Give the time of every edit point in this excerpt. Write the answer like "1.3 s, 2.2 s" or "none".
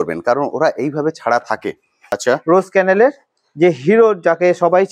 2.1 s